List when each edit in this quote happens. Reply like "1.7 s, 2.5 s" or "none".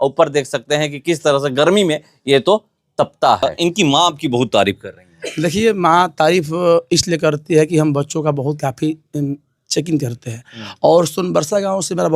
3.7 s

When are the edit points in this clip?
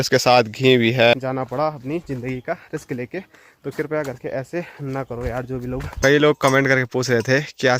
1.1 s, 6.0 s

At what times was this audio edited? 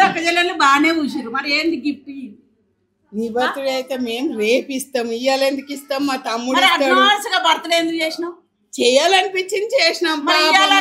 none

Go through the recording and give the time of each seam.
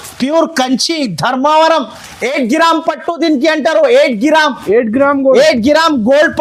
none

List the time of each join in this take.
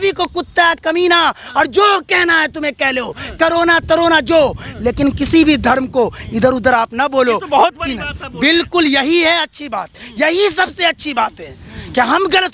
none

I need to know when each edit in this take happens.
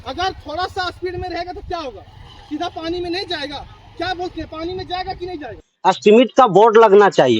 5.6 s

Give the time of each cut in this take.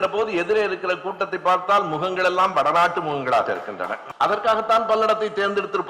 4.0 s

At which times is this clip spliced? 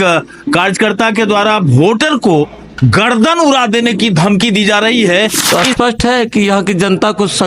5.4 s

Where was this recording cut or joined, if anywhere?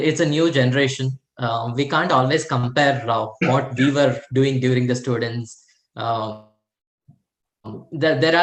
none

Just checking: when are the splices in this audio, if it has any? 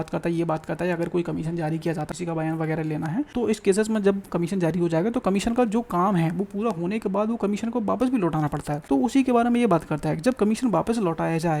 2.1 s, 3.3 s, 8.7 s

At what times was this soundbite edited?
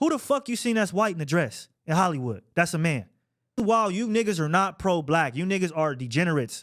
3.6 s

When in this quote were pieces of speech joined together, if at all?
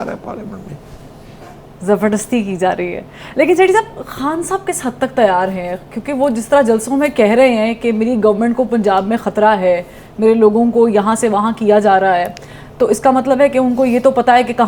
none

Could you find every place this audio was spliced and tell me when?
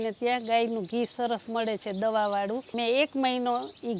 2.7 s

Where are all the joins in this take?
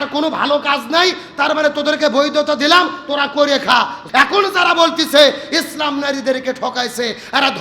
4.0 s

